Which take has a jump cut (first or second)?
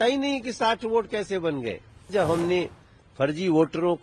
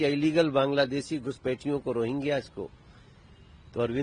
first